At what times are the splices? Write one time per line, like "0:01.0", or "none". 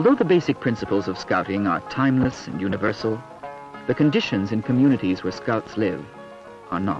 none